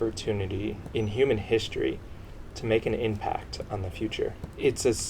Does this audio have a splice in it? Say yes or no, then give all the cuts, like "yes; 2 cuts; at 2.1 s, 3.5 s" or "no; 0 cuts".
no; 0 cuts